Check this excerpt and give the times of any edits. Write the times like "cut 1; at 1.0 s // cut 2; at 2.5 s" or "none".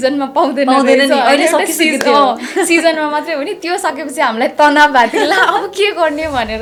none